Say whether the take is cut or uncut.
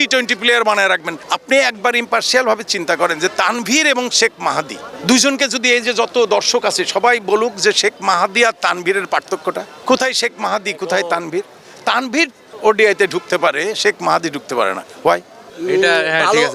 cut